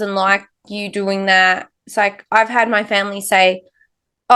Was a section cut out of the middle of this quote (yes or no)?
no